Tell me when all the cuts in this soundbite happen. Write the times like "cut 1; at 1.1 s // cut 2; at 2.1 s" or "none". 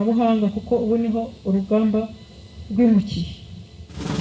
none

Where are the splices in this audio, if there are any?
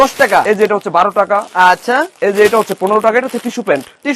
none

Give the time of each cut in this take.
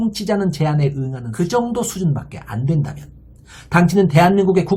cut 1; at 1.2 s

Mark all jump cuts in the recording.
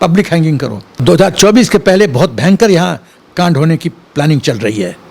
cut 1; at 1.0 s

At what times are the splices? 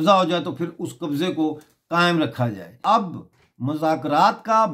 cut 1; at 2.7 s

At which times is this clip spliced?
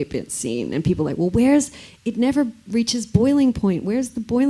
none

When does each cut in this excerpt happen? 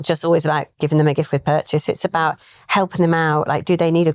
none

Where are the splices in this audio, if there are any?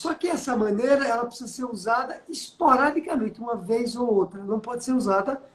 none

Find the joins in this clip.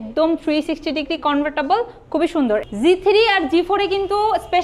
cut 1; at 2.6 s

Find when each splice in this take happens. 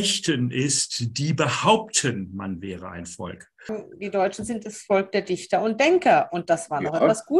cut 1; at 3.8 s

